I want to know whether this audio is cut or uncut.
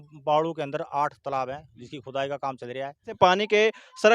cut